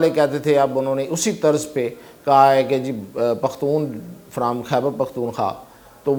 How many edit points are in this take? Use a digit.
0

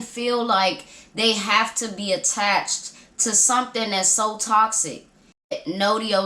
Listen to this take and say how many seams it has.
1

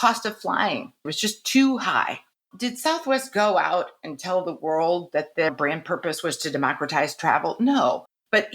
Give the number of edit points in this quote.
2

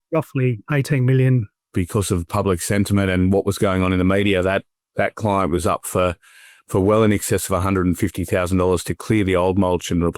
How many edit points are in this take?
1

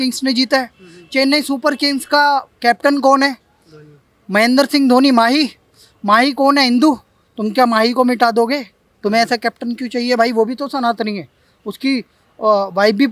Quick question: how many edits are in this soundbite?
0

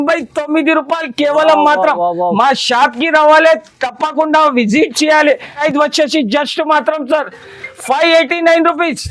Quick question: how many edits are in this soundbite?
1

